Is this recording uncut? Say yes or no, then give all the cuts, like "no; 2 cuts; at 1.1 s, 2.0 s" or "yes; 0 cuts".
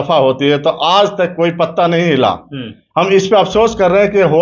yes; 0 cuts